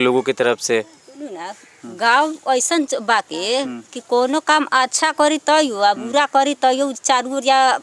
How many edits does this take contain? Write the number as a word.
zero